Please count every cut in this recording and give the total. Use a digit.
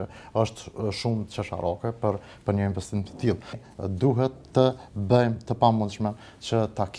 1